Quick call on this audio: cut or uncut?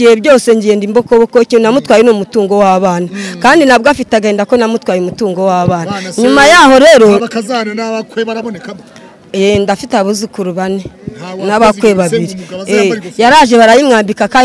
uncut